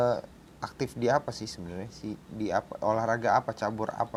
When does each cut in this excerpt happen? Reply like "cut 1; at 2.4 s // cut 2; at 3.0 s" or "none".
none